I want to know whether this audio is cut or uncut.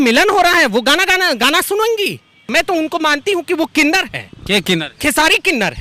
cut